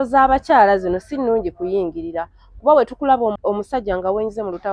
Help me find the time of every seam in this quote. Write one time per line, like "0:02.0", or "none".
0:03.4